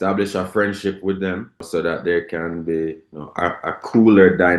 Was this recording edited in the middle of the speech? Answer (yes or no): yes